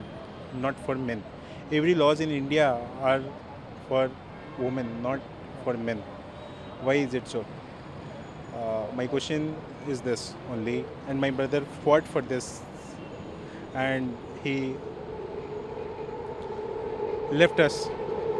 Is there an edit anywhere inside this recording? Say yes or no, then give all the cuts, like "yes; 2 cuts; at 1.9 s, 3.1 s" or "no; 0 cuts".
no; 0 cuts